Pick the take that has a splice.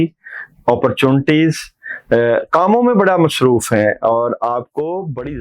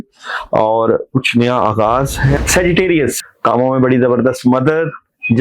second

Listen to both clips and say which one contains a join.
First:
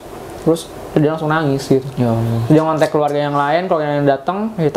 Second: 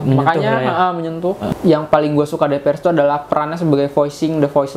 second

